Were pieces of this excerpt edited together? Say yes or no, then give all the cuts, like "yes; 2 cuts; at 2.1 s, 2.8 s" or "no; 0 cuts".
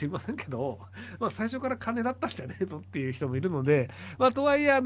no; 0 cuts